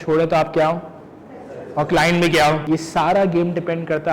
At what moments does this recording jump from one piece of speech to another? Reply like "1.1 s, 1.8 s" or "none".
2.6 s